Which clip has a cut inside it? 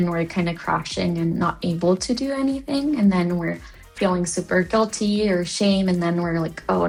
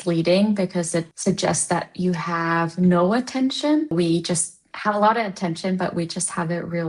second; 2 cuts; at 1.1 s, 3.9 s

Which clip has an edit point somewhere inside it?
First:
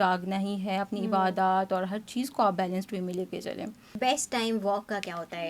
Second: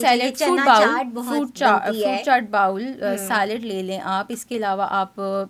first; 1 cut; at 3.8 s

